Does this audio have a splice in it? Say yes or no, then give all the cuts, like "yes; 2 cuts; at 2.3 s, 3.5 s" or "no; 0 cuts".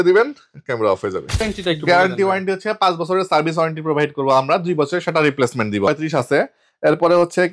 yes; 2 cuts; at 1.4 s, 5.9 s